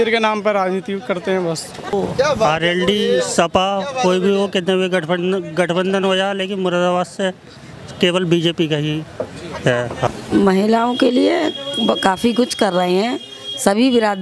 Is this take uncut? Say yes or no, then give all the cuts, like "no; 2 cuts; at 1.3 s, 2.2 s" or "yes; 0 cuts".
no; 2 cuts; at 1.9 s, 10.1 s